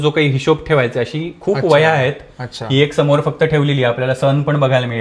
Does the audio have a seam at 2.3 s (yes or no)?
no